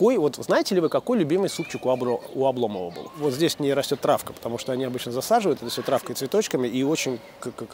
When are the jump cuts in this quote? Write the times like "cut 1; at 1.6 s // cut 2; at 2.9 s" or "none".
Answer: cut 1; at 3.0 s